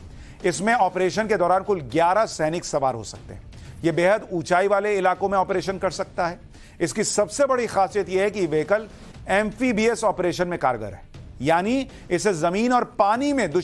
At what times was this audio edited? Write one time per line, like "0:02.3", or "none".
none